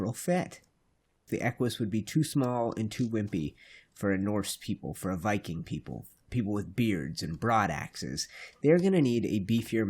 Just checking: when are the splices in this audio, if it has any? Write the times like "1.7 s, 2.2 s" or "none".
1.2 s